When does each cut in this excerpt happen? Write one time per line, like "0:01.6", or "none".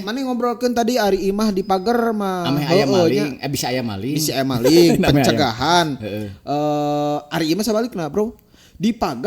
none